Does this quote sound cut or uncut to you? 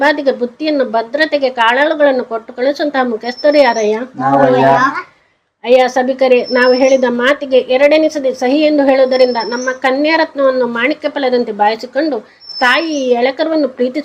uncut